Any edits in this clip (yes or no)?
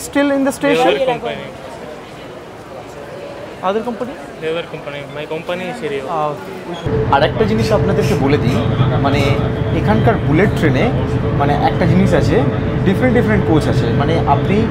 yes